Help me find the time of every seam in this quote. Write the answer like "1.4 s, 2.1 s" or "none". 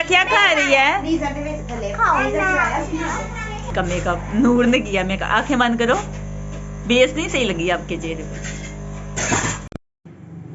3.7 s, 9.6 s